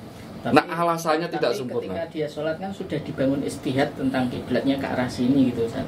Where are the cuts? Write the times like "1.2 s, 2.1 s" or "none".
none